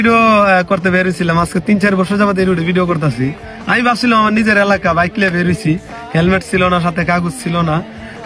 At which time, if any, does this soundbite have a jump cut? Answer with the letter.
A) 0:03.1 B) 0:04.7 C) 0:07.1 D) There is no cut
D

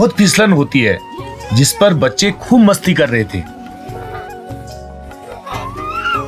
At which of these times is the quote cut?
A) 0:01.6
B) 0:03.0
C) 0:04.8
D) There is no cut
D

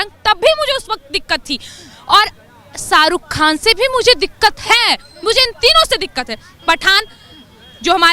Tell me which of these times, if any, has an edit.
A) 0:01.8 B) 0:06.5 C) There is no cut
C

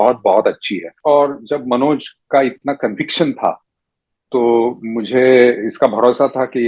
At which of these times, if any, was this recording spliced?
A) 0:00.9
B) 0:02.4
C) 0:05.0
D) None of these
A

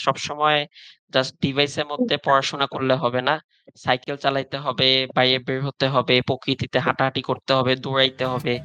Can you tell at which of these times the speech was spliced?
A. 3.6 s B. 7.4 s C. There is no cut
C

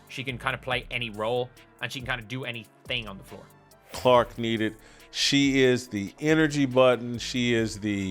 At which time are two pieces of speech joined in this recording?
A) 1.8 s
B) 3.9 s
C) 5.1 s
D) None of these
B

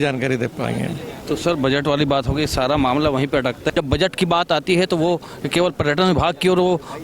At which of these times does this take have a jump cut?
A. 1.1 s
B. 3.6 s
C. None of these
B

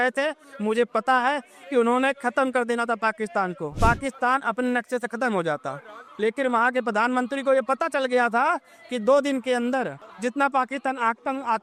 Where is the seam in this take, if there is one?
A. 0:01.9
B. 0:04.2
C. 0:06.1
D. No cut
D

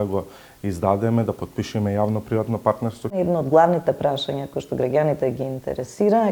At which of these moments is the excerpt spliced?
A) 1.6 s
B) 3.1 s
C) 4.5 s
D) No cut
B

